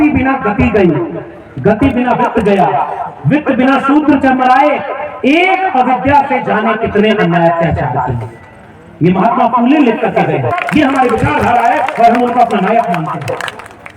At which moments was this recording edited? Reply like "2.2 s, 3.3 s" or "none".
10.6 s